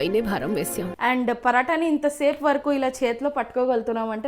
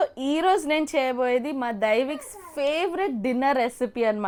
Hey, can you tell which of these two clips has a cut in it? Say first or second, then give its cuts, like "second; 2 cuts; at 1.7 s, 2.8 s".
first; 1 cut; at 0.9 s